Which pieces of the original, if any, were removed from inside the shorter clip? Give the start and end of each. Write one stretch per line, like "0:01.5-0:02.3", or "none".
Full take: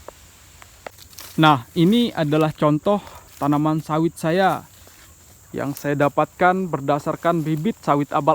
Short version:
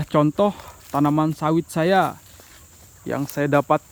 none

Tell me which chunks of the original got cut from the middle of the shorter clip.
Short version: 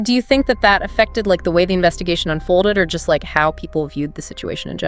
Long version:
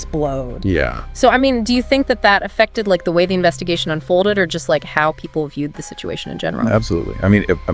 none

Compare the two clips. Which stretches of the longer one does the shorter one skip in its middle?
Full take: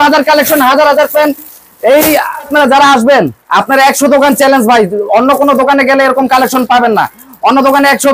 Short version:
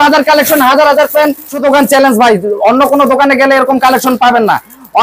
0:01.5-0:04.0

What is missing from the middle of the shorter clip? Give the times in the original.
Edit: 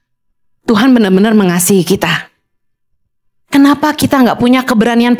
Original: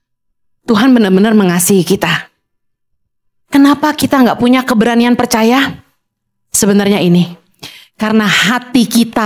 none

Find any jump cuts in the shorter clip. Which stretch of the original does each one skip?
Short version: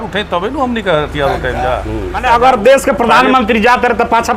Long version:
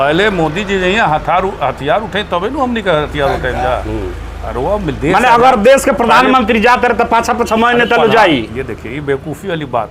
0:04.2-0:05.2

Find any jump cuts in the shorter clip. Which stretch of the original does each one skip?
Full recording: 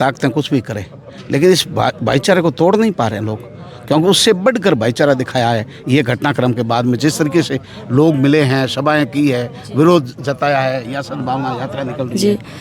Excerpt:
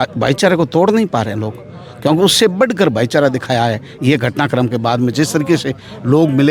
none

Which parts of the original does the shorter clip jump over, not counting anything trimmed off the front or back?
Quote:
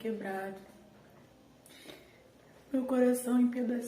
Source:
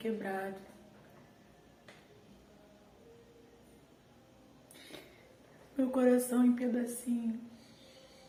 0:01.3-0:04.3

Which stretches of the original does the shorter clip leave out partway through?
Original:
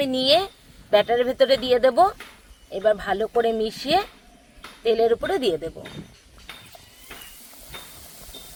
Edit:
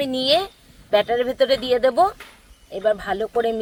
none

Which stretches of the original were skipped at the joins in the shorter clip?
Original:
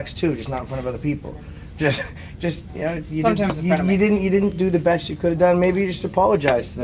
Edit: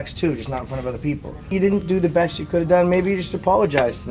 0:01.5-0:04.2

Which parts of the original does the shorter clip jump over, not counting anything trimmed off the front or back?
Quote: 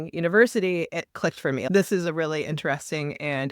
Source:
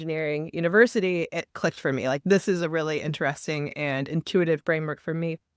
0:02.1-0:02.2

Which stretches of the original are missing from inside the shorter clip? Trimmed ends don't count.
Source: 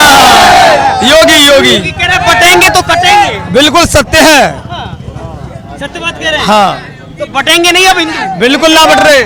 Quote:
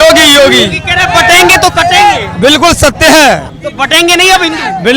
0:04.6-0:07.1

